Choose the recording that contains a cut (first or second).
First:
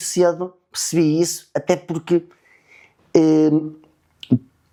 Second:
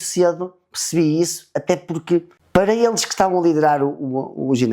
second